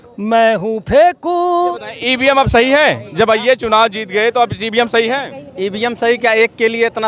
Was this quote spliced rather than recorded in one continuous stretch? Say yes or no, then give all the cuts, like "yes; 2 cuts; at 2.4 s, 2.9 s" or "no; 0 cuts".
yes; 1 cut; at 1.7 s